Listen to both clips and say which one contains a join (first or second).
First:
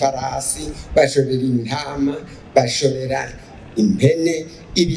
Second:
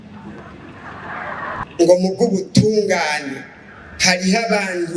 second